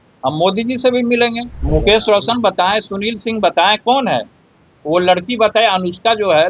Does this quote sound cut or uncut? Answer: cut